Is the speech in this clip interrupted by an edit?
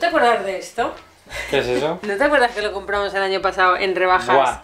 no; 0 cuts

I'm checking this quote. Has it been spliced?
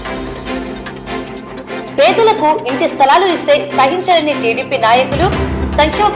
yes; 1 cut; at 1.4 s

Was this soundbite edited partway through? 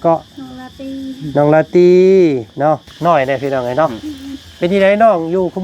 yes; 1 cut; at 2.9 s

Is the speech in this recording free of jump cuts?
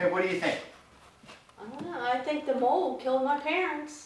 yes; 0 cuts

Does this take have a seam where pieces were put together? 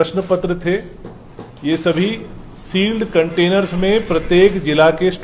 no; 0 cuts

